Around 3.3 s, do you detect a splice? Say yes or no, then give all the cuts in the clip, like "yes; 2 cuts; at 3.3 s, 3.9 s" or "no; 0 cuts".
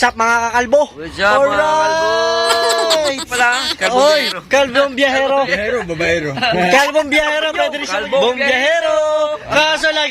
yes; 2 cuts; at 3.3 s, 7.9 s